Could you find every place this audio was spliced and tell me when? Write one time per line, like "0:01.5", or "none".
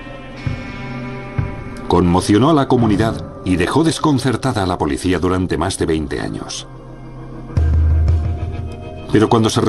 0:06.3